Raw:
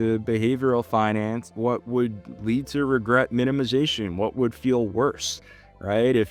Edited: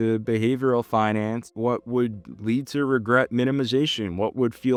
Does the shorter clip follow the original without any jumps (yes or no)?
yes